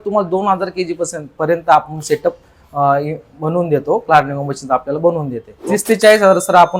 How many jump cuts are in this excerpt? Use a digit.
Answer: 1